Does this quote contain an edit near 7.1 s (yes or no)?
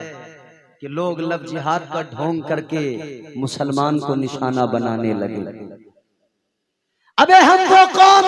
no